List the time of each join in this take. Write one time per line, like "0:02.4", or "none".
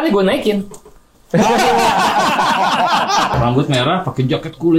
0:03.3